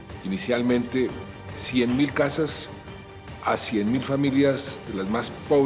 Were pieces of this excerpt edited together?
no; 0 cuts

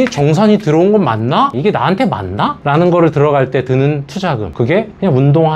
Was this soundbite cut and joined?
yes; 1 cut; at 1.5 s

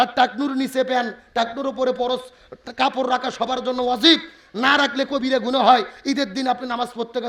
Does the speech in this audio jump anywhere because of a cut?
no; 0 cuts

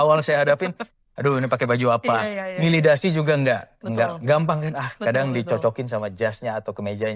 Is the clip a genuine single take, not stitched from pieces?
yes; 0 cuts

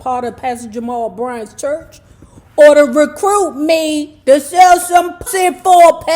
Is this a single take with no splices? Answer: no; 1 cut; at 5.2 s

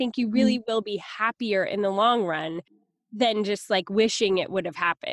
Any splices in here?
yes; 1 cut; at 2.6 s

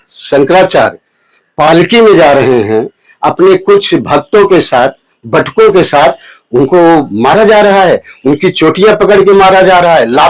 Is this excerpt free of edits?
yes; 0 cuts

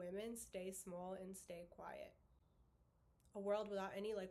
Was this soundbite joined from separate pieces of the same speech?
no; 0 cuts

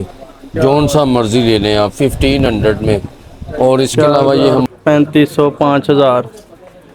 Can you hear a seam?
yes; 1 cut; at 4.7 s

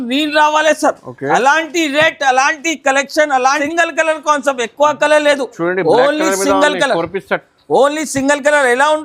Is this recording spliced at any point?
yes; 1 cut; at 3.6 s

